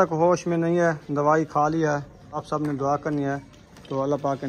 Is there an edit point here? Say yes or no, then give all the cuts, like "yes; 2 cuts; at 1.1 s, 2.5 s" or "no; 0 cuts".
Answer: yes; 1 cut; at 2.4 s